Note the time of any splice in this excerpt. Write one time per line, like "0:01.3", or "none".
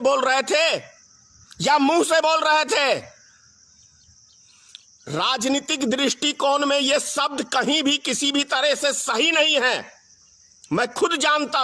none